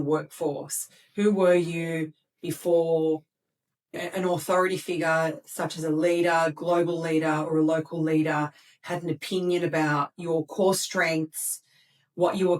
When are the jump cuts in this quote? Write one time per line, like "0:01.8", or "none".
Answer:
0:04.0